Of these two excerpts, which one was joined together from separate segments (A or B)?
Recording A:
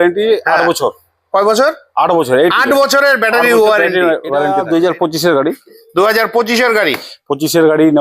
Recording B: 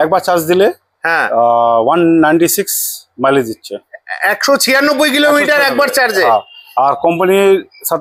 A